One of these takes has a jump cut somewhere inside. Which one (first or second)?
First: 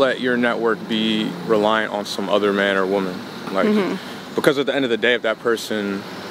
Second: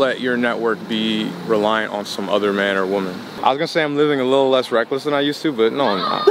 second